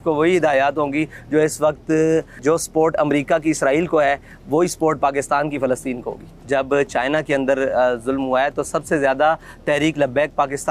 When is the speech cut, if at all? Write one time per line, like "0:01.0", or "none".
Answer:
0:02.3
0:06.3